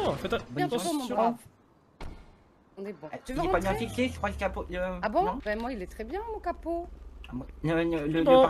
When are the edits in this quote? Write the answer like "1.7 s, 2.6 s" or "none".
none